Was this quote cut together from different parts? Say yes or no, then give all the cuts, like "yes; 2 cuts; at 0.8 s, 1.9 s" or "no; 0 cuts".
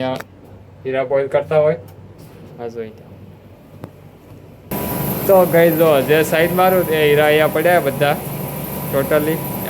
yes; 1 cut; at 4.7 s